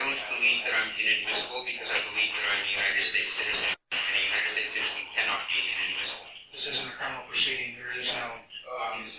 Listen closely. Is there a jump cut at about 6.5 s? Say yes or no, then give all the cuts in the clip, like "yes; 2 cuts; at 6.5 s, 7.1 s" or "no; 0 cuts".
yes; 1 cut; at 6.5 s